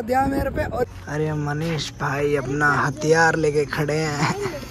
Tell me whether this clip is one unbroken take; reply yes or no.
no